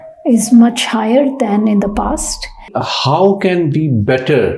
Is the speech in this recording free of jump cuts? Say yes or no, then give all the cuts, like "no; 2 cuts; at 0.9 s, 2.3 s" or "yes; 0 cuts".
no; 1 cut; at 2.8 s